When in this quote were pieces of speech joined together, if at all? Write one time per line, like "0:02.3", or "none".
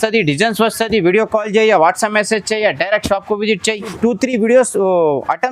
0:03.9